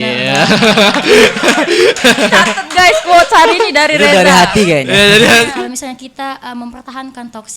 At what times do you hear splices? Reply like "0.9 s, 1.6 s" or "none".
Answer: 5.5 s